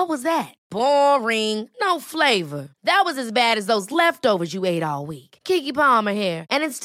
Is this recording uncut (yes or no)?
yes